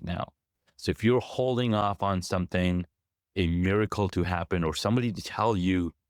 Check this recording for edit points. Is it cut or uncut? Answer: uncut